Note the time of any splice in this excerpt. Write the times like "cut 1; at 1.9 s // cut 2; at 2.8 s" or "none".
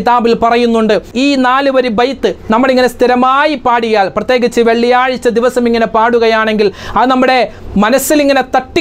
cut 1; at 1.1 s